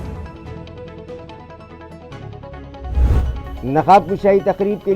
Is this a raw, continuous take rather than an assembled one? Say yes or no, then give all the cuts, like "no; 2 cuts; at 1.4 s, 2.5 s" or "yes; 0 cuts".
no; 1 cut; at 3.4 s